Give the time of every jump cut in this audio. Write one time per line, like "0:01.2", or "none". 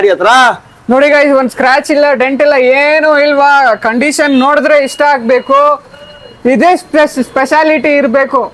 none